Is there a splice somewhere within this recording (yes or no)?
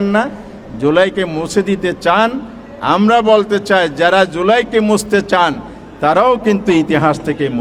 no